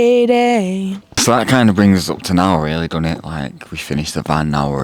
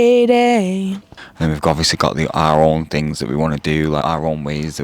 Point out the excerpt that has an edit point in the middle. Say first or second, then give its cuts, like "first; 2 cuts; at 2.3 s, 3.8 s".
second; 1 cut; at 1.2 s